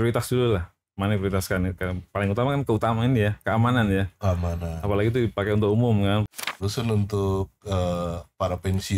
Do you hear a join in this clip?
yes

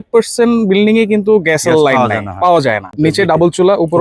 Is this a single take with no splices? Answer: no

